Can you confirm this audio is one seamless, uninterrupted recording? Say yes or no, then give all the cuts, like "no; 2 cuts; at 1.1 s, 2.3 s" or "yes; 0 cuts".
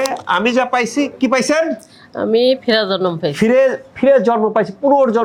yes; 0 cuts